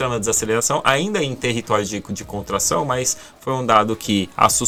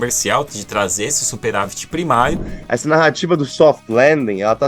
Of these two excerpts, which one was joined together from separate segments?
second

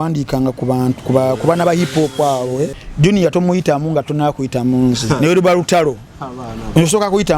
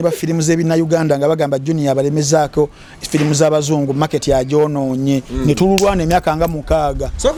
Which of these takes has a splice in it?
first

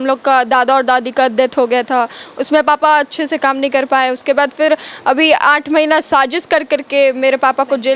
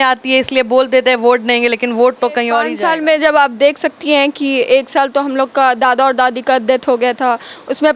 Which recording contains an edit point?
second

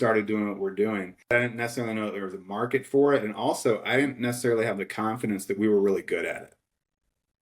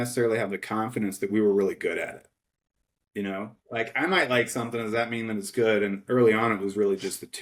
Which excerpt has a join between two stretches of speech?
first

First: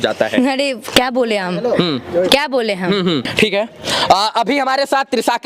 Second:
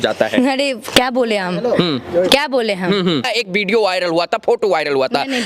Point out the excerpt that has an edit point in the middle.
second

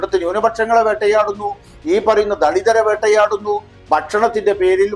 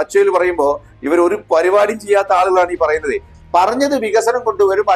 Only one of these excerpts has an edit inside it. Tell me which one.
second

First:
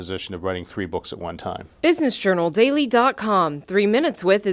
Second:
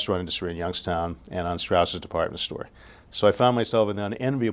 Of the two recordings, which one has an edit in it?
first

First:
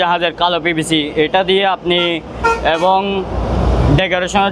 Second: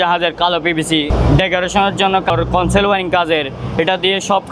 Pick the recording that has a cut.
second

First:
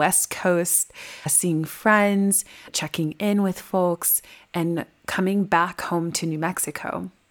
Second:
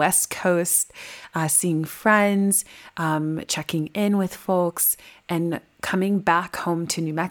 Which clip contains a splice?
first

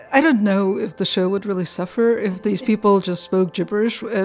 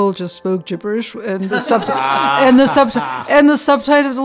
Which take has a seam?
first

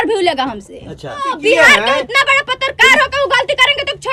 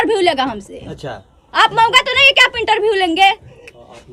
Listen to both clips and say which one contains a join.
first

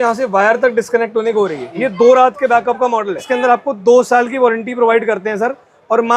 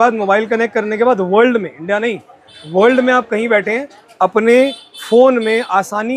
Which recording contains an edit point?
first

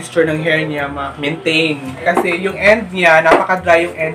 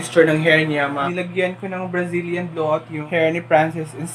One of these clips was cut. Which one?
second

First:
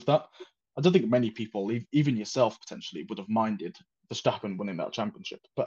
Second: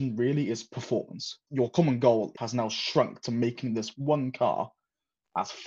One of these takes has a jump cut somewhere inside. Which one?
second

